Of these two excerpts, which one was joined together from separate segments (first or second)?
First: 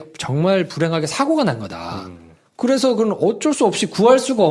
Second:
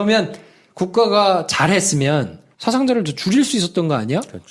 second